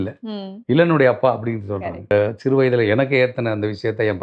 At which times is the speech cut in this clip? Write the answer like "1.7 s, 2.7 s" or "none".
2.1 s

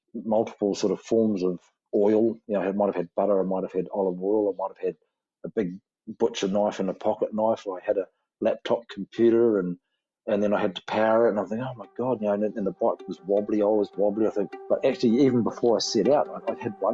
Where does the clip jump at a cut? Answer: none

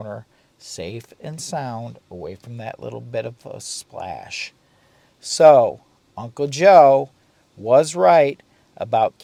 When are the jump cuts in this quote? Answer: none

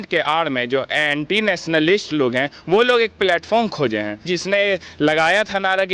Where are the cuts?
4.2 s

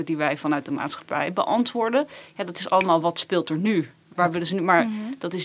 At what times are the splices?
none

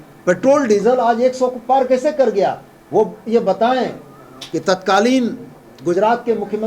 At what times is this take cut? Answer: none

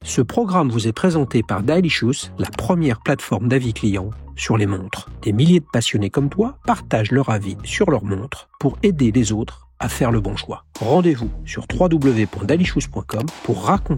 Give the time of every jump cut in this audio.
none

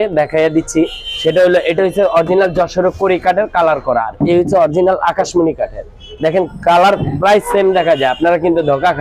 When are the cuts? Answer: none

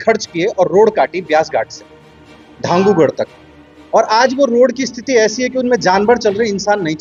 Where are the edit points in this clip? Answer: none

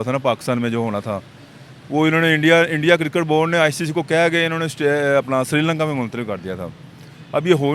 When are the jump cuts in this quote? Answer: none

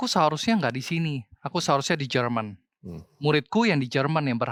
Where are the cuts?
none

